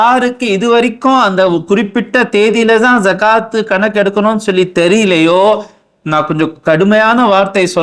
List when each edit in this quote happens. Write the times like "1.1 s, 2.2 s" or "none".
none